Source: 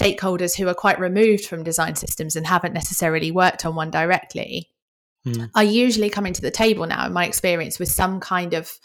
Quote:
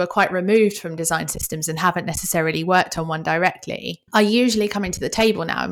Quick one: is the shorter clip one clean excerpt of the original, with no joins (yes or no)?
no